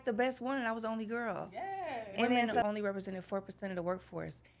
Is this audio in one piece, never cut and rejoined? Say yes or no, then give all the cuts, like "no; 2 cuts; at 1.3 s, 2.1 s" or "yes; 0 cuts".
no; 1 cut; at 2.6 s